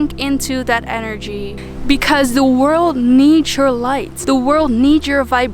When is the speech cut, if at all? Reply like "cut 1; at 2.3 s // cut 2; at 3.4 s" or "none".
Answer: cut 1; at 1.7 s // cut 2; at 4.1 s

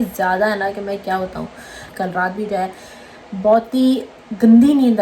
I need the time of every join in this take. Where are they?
cut 1; at 1.9 s

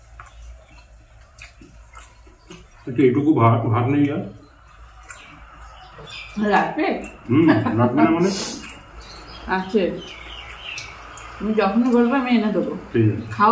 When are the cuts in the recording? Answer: none

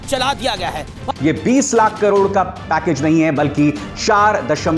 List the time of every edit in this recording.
cut 1; at 1.0 s

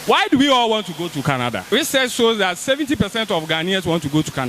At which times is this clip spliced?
cut 1; at 1.6 s

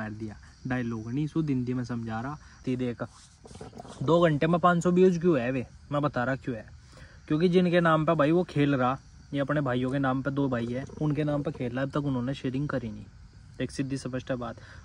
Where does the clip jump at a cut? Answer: cut 1; at 2.6 s

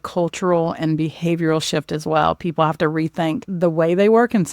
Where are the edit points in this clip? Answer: cut 1; at 3.5 s

